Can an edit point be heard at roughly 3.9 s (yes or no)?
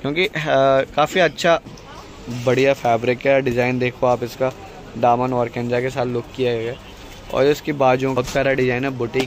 no